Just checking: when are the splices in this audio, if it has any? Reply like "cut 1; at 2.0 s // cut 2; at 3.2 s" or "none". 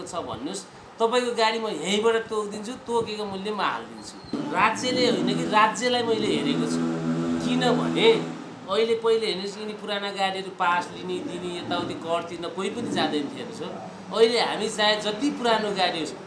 cut 1; at 4.3 s